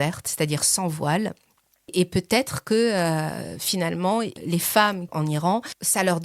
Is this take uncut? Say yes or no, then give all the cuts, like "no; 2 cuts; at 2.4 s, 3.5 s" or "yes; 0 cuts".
no; 1 cut; at 5.3 s